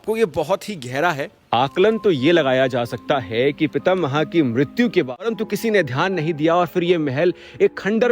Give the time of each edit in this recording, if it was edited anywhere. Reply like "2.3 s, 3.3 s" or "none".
5.3 s